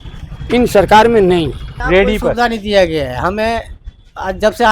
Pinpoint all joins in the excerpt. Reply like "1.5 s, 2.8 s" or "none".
1.7 s